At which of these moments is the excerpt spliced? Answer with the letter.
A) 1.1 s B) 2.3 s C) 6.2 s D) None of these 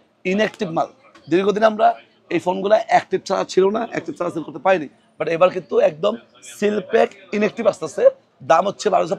D